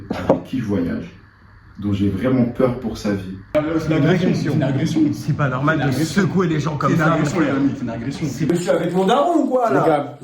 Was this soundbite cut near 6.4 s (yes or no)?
no